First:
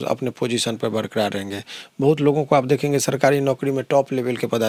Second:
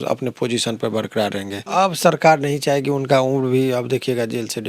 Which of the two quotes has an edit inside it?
second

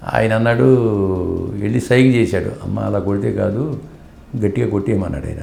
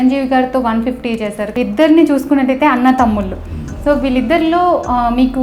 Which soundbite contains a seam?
second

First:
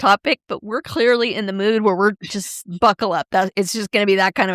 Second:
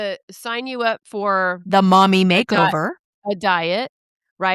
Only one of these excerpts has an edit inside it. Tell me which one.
first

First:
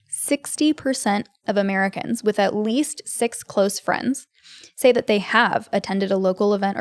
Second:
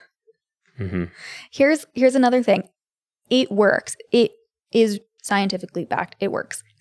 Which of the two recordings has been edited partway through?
second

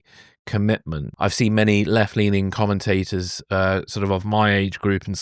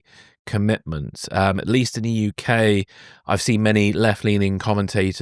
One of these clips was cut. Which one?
first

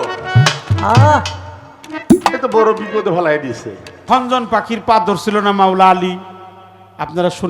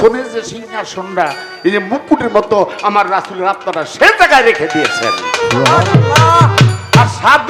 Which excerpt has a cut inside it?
first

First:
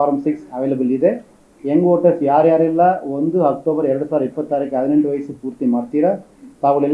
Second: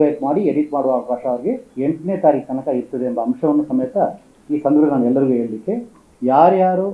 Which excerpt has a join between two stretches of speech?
second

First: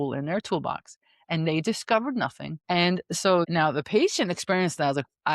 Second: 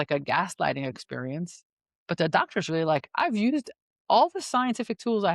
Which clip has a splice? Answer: first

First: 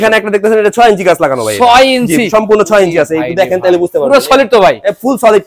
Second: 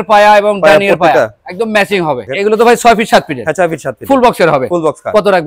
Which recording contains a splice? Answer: second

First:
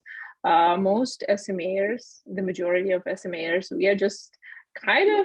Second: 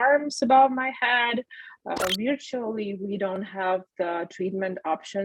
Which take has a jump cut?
second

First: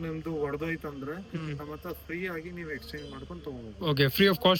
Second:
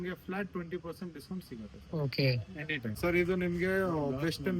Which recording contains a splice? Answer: second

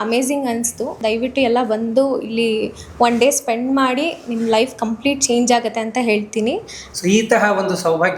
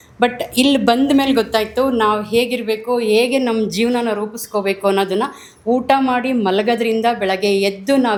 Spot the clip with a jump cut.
first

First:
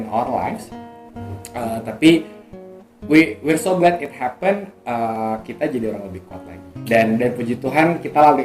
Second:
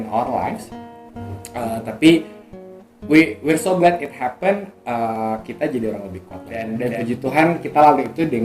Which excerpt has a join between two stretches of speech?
second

